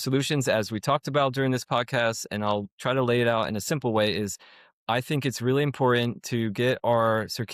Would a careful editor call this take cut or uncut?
uncut